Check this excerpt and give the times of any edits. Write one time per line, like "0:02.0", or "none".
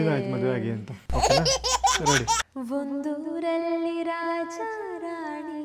0:02.5